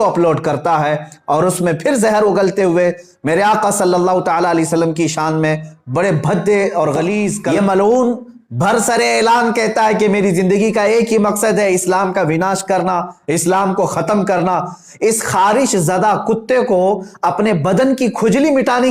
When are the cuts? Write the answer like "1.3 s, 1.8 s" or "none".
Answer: 7.4 s